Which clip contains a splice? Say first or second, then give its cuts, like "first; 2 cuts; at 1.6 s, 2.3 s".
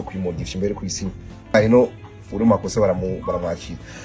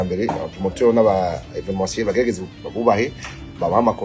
first; 1 cut; at 1.5 s